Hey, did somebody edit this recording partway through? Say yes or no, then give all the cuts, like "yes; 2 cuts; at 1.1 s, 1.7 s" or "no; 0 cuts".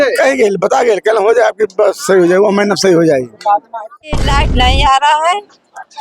yes; 1 cut; at 4.1 s